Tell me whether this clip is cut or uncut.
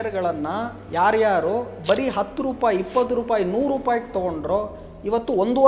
uncut